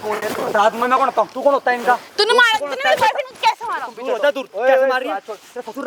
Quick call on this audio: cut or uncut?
uncut